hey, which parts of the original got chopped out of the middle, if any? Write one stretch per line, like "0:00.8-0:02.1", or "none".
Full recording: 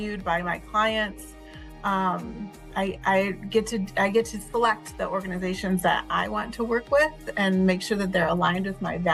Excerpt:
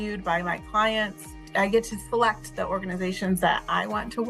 0:01.5-0:03.9

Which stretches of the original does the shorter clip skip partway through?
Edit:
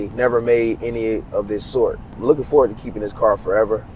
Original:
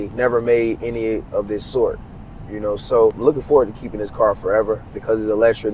0:02.2-0:03.2

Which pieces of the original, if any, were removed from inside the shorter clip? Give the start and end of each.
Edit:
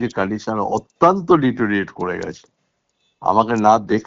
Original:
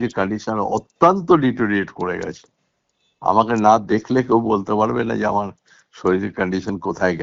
none

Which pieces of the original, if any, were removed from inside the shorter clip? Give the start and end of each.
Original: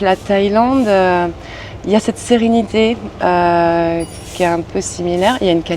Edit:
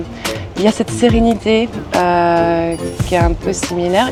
none

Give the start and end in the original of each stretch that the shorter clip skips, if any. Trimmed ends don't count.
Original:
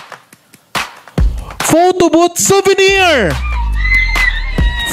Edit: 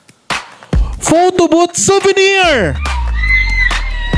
0:01.5-0:01.7

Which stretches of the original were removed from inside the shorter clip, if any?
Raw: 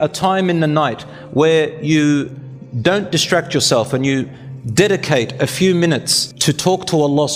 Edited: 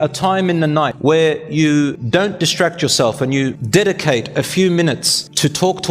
0:00.9-0:01.3
0:02.3-0:02.7
0:04.3-0:04.6

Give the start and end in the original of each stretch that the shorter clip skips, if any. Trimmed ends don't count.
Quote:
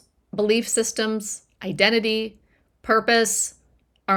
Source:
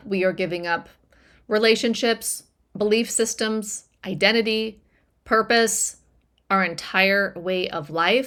none

